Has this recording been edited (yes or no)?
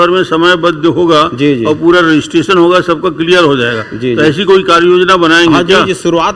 no